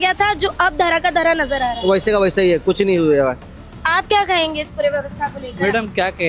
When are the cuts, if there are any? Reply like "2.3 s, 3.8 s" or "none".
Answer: none